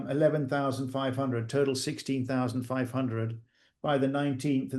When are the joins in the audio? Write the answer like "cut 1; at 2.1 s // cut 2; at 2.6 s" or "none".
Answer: none